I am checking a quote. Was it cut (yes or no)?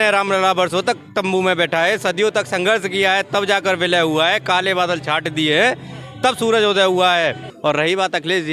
yes